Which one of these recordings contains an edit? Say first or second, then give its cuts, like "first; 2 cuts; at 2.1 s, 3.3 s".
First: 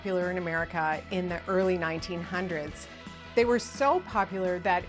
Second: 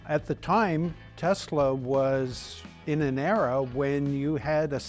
second; 1 cut; at 1.0 s